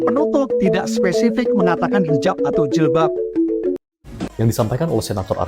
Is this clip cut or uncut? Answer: cut